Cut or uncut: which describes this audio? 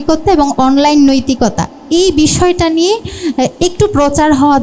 uncut